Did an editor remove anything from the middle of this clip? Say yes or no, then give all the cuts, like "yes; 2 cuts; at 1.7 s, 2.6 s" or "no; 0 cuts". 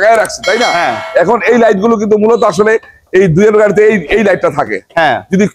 no; 0 cuts